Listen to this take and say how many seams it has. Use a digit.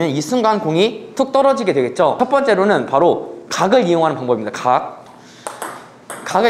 2